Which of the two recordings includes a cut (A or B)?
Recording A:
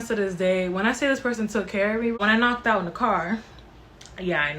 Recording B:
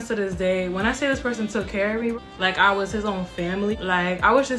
A